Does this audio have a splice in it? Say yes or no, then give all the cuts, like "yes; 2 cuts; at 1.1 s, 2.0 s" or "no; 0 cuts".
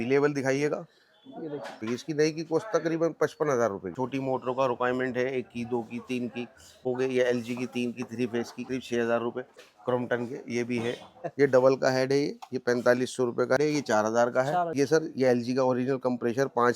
yes; 8 cuts; at 1.8 s, 4.0 s, 6.8 s, 8.6 s, 9.6 s, 11.3 s, 13.6 s, 14.7 s